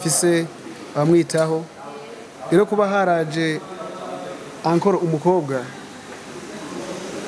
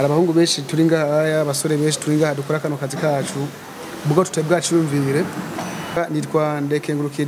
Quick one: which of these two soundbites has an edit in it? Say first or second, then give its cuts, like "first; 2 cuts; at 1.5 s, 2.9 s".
second; 1 cut; at 6.0 s